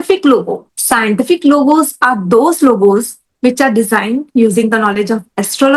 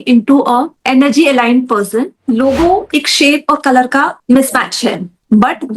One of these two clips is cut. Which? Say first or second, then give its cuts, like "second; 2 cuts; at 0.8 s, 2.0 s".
second; 1 cut; at 2.2 s